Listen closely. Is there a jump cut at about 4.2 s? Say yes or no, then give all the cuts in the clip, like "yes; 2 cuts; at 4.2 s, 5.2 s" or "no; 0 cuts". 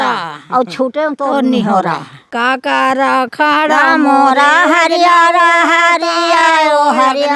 no; 1 cut; at 2.3 s